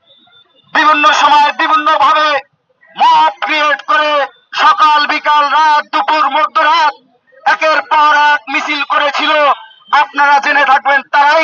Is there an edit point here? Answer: no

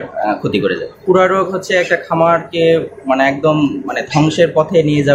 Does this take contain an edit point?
yes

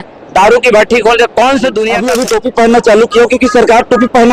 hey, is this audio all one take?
no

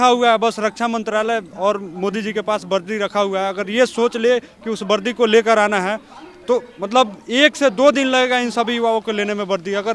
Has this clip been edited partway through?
no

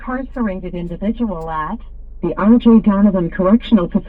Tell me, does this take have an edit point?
no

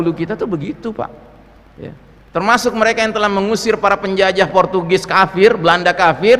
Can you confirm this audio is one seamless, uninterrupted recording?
yes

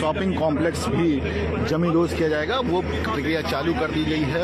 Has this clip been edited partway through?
no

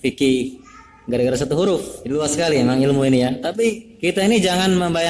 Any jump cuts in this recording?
yes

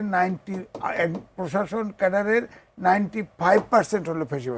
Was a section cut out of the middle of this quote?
no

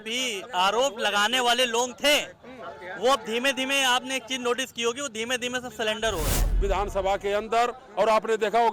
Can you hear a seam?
yes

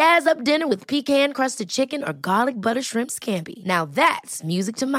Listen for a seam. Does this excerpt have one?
no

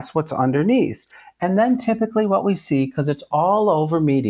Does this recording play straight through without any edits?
yes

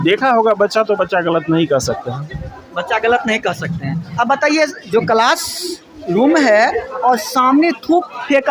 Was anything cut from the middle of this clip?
no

